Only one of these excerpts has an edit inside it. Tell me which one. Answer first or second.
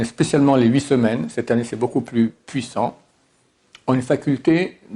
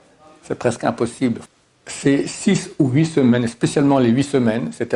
second